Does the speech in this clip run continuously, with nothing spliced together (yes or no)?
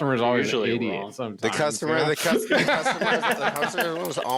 yes